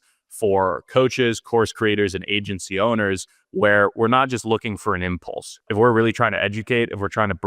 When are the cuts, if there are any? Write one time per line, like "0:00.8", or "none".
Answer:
0:05.6